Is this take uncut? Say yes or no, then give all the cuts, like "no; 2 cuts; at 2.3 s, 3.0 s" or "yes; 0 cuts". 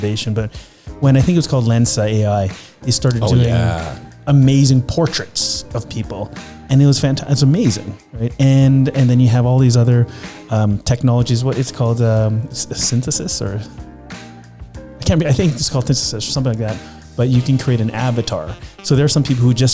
yes; 0 cuts